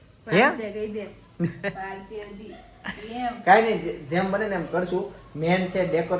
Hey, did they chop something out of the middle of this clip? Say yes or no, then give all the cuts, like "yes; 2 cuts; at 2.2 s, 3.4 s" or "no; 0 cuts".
no; 0 cuts